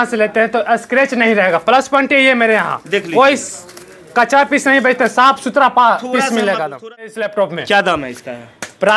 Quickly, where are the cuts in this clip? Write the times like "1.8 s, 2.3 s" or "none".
7.1 s